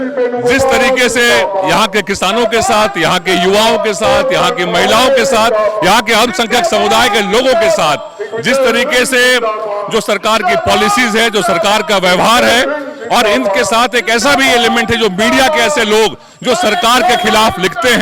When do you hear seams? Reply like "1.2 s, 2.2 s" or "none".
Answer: none